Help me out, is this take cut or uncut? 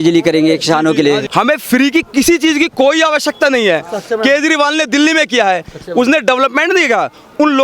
cut